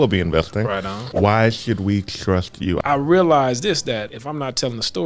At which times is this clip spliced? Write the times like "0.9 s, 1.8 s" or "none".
1.0 s, 2.8 s, 4.2 s